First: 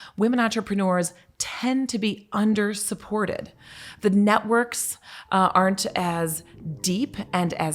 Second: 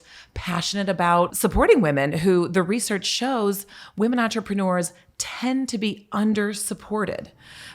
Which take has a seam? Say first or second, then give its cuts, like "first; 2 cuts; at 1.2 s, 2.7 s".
second; 1 cut; at 1.3 s